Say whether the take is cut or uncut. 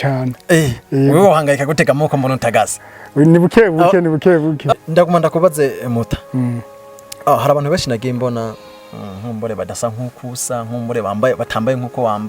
cut